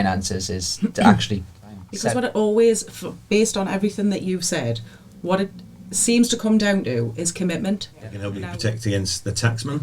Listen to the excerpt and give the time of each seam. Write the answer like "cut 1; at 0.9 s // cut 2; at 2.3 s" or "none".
cut 1; at 1.9 s // cut 2; at 8.2 s